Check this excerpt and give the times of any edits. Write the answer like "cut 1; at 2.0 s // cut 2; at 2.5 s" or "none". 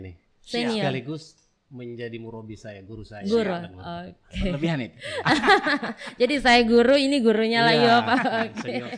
none